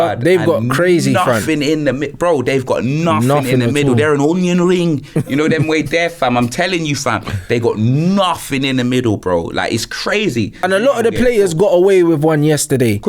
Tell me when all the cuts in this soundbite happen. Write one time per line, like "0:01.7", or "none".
0:10.6